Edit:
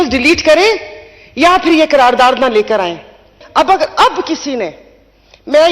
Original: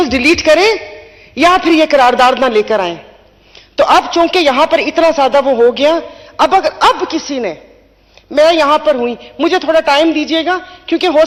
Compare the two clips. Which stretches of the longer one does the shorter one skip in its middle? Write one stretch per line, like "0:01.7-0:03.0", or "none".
0:03.3-0:06.2